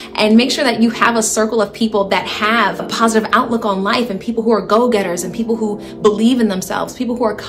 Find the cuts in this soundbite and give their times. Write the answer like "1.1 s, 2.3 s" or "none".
2.8 s